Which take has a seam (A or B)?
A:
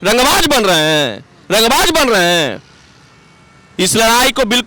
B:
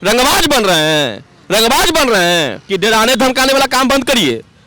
B